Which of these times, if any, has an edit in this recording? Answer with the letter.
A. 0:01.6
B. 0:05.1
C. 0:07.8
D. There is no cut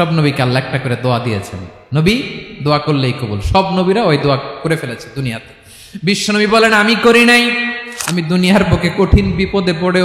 C